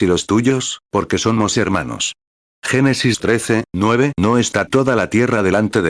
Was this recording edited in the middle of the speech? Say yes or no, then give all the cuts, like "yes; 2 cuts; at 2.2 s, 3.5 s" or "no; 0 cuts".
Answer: no; 0 cuts